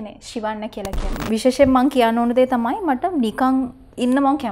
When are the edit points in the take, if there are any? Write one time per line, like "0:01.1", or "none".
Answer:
0:01.1